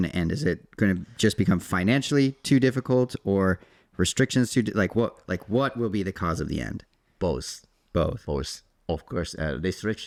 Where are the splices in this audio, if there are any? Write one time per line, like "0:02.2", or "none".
none